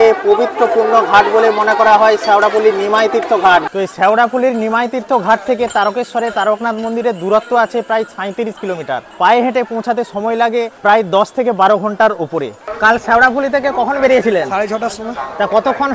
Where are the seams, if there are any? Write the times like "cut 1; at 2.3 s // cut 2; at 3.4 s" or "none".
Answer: cut 1; at 3.7 s // cut 2; at 9.1 s // cut 3; at 10.7 s // cut 4; at 12.6 s